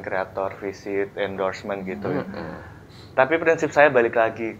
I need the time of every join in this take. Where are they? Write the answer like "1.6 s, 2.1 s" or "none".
none